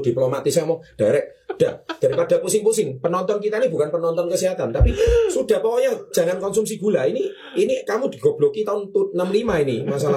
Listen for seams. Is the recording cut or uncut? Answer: uncut